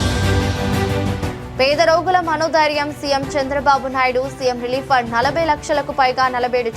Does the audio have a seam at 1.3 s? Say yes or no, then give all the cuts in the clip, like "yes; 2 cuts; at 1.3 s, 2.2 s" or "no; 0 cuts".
yes; 1 cut; at 1.3 s